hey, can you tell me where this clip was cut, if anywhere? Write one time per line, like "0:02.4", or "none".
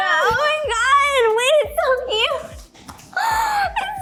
none